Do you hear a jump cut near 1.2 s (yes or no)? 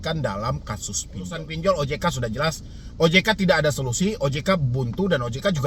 yes